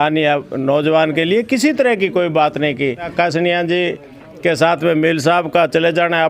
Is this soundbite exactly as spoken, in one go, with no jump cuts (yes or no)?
no